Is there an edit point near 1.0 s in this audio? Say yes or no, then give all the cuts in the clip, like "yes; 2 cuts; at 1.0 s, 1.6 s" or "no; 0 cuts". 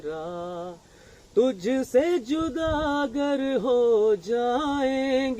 no; 0 cuts